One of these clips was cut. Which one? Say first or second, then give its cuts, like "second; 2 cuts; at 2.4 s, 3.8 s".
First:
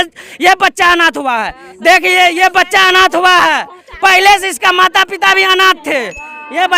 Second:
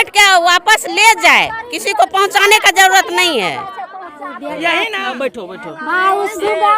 second; 1 cut; at 5.0 s